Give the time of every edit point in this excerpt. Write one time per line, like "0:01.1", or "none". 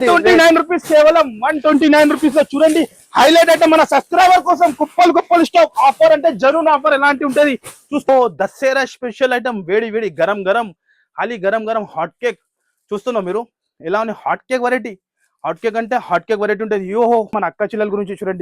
0:08.1
0:17.3